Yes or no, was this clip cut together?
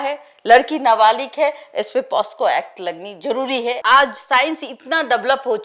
yes